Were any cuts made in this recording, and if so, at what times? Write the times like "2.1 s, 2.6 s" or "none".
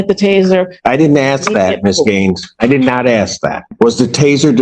3.6 s